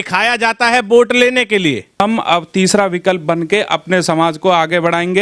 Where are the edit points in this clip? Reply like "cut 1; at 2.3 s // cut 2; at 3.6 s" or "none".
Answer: cut 1; at 2.0 s

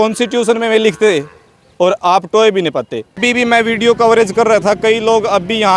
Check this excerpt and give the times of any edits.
cut 1; at 3.2 s

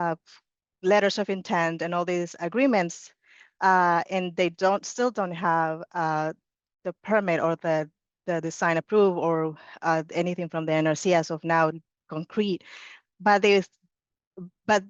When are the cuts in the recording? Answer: none

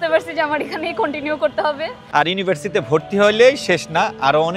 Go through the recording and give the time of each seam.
cut 1; at 2.0 s

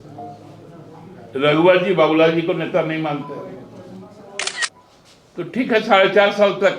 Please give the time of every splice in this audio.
cut 1; at 4.7 s

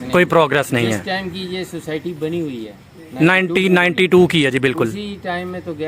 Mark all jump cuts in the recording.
none

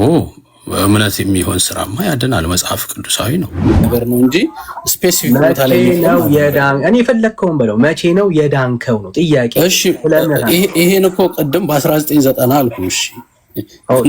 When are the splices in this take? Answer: cut 1; at 3.8 s

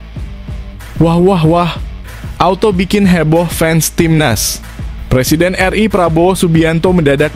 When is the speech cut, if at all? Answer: cut 1; at 1.0 s

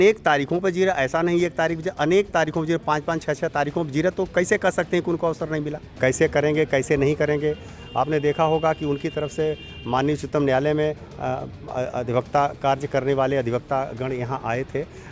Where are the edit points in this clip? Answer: cut 1; at 5.8 s

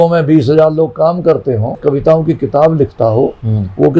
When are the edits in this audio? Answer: cut 1; at 1.8 s

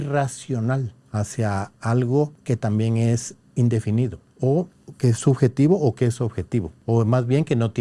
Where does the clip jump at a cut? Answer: cut 1; at 1.0 s // cut 2; at 2.4 s // cut 3; at 4.2 s // cut 4; at 4.8 s // cut 5; at 6.7 s

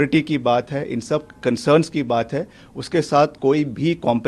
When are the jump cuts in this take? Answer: none

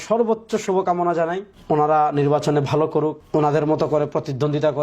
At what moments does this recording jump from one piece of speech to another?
cut 1; at 1.5 s // cut 2; at 3.2 s

